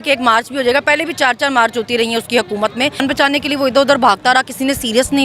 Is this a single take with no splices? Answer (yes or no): no